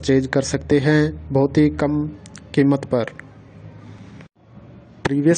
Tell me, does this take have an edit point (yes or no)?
yes